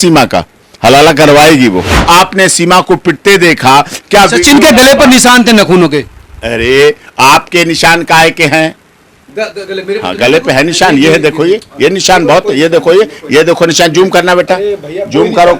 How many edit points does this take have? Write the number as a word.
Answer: one